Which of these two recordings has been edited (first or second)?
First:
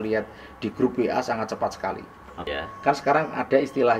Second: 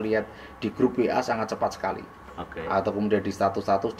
first